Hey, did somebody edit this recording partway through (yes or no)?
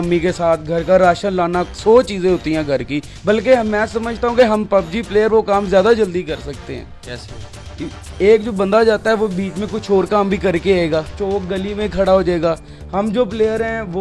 no